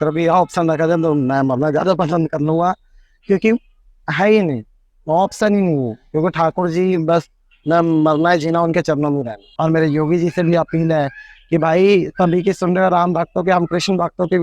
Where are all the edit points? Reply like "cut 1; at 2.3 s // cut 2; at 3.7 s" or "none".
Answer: cut 1; at 9.4 s